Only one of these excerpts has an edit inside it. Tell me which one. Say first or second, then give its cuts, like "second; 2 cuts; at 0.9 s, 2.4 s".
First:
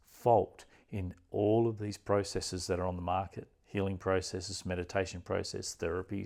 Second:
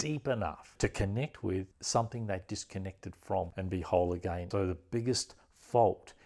second; 3 cuts; at 1.8 s, 3.5 s, 4.4 s